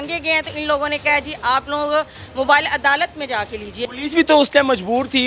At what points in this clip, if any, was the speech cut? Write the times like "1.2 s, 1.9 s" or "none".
3.8 s